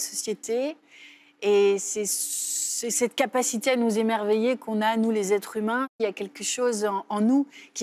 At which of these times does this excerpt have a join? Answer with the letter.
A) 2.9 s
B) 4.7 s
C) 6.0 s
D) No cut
C